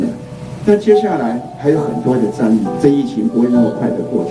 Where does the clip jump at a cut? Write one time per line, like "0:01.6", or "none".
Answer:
0:02.7

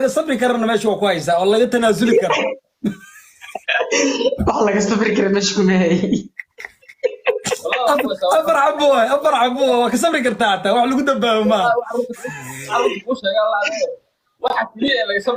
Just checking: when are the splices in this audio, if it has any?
none

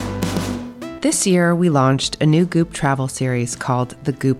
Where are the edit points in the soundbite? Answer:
0:00.9

